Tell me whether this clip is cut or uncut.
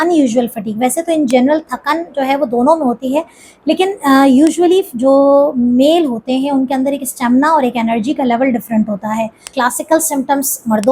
cut